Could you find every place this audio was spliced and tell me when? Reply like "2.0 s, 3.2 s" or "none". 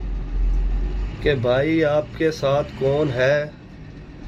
none